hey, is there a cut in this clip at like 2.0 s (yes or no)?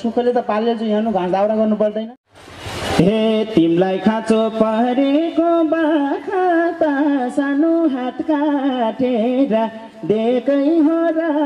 yes